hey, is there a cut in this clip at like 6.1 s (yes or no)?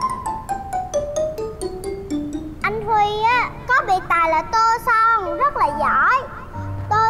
no